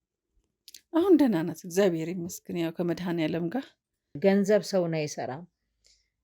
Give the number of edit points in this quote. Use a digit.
1